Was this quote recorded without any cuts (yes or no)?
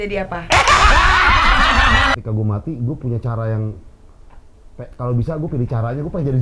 no